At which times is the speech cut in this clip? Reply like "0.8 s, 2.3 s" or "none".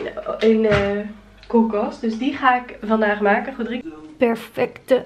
3.8 s